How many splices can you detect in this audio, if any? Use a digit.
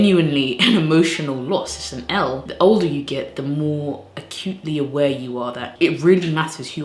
2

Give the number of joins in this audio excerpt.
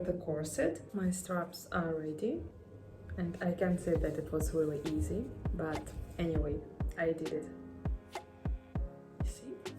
2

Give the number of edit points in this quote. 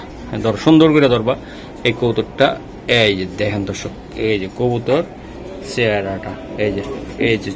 0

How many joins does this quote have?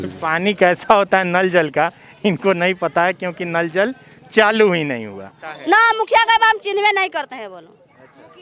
1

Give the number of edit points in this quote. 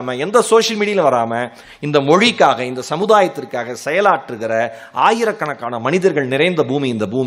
0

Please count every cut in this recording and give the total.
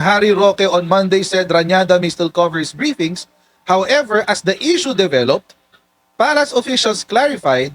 0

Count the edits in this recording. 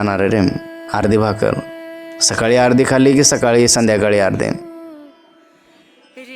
1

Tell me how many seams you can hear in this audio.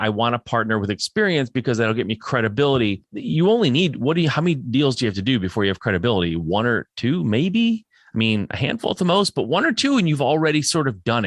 1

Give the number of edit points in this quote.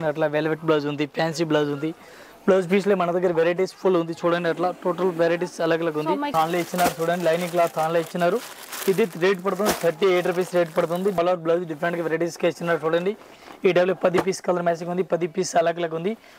2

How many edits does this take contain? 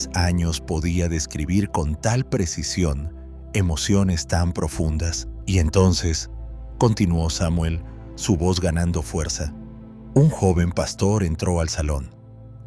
0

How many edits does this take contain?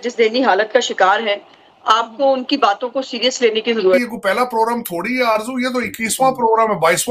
1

